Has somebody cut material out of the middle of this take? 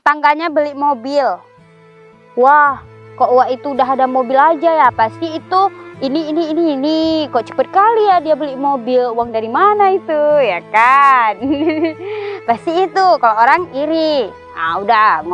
no; 0 cuts

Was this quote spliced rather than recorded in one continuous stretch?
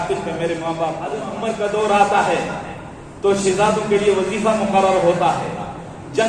yes; 1 cut; at 1.2 s

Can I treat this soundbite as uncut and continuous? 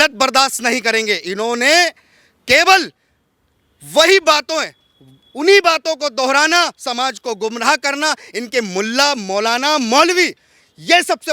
yes; 0 cuts

